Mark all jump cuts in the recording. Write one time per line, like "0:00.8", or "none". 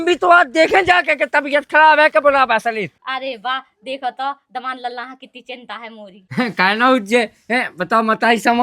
0:02.9
0:06.2